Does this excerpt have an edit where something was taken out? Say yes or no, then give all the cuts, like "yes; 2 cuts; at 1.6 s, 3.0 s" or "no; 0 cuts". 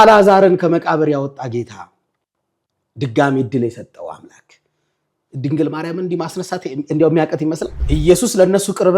yes; 1 cut; at 7.7 s